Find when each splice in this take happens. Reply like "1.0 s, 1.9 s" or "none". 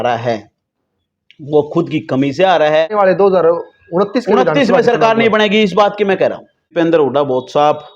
2.9 s, 6.6 s